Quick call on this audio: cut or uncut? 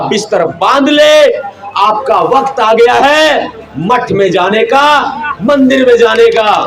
uncut